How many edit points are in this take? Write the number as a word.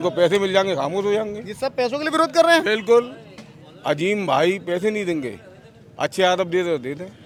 zero